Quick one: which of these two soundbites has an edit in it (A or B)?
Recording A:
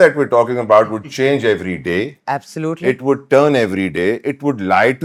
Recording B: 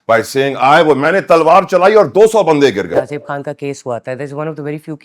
B